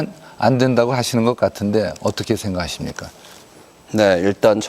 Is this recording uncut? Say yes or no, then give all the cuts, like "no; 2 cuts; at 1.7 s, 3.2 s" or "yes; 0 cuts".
no; 1 cut; at 1.1 s